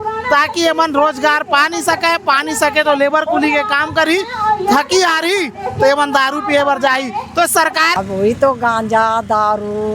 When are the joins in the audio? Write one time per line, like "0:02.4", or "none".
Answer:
0:07.9